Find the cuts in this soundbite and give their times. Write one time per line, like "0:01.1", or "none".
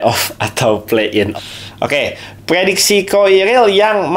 0:01.3